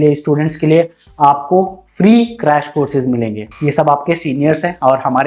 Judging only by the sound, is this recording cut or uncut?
cut